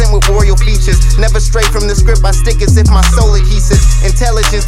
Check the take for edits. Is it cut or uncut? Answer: uncut